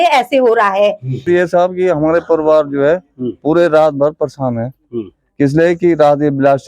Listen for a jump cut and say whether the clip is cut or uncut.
cut